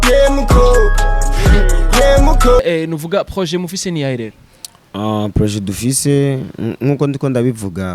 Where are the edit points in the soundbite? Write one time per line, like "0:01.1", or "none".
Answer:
0:02.6